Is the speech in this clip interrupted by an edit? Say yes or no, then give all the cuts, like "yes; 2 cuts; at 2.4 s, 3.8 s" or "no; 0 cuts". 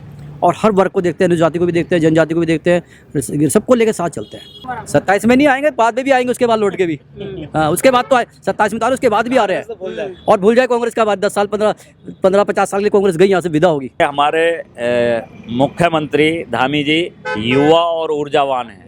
yes; 2 cuts; at 4.6 s, 14.0 s